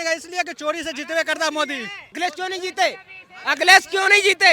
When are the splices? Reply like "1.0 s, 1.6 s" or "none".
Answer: 2.1 s